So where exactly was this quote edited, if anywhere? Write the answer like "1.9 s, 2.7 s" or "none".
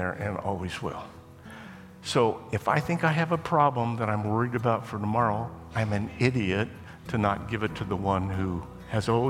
none